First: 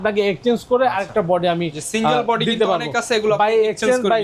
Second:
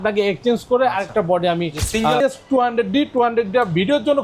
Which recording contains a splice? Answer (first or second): second